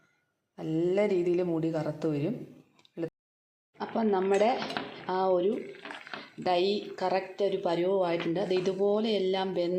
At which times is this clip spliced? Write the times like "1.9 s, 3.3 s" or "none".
3.1 s